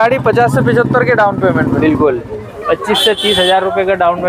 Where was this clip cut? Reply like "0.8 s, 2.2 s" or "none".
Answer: 2.3 s